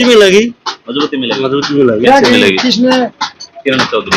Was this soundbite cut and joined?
no; 0 cuts

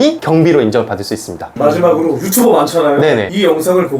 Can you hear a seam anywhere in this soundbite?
no; 0 cuts

